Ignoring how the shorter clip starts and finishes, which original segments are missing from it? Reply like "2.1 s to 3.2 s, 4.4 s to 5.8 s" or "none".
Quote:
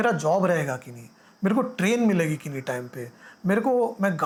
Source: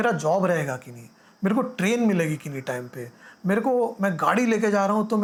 none